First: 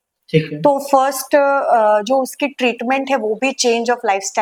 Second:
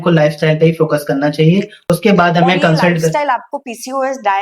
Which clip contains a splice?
second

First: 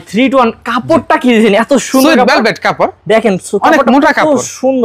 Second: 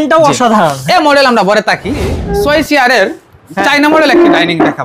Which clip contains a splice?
second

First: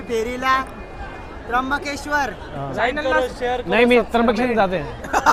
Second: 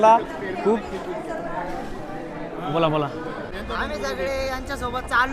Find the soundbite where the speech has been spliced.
second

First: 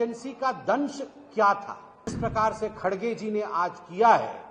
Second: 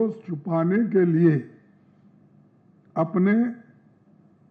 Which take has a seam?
first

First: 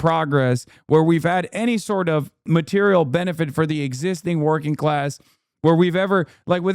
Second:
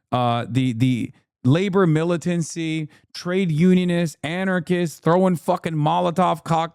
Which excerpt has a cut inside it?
first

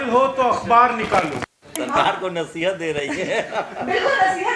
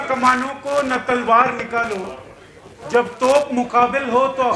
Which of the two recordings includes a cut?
first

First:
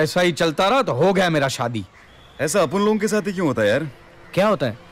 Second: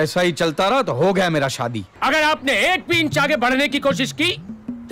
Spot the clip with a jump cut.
second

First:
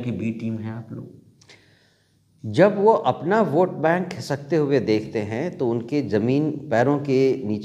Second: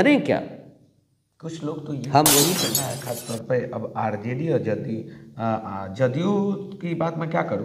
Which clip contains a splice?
second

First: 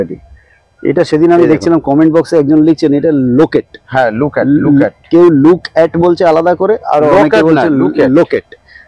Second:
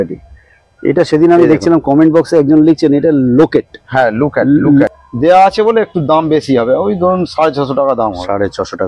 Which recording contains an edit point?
second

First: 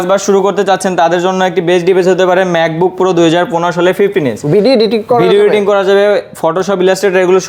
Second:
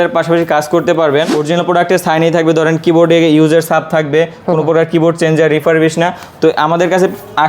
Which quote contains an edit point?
second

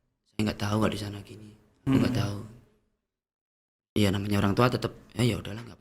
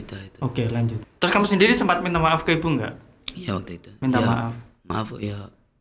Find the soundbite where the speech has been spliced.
second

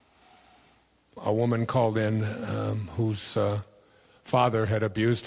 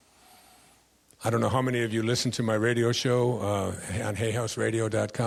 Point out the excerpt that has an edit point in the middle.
first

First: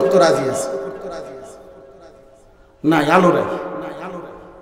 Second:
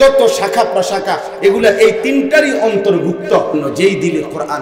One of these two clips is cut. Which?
second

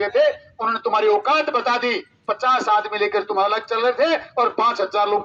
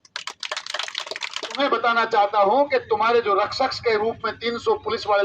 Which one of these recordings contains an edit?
second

